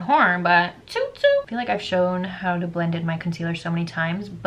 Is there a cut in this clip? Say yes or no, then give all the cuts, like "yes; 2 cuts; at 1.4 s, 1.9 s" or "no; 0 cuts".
no; 0 cuts